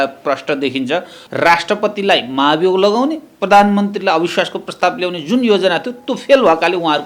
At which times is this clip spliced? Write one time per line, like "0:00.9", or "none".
0:01.2